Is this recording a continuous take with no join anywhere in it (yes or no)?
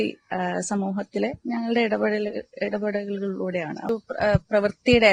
no